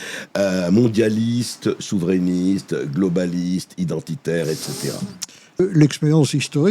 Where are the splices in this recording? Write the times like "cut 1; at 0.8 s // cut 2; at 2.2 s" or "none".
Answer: cut 1; at 5.6 s